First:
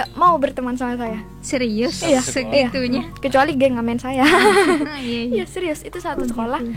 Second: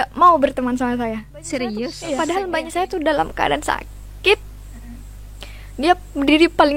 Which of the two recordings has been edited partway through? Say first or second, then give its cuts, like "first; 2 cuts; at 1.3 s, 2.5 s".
second; 1 cut; at 2.0 s